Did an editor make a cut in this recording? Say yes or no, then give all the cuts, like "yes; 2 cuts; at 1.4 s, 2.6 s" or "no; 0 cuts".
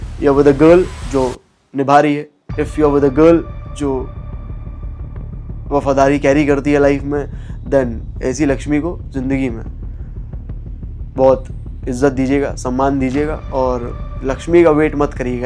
yes; 2 cuts; at 4.1 s, 5.4 s